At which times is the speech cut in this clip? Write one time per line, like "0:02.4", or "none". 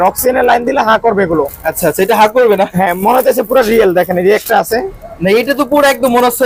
none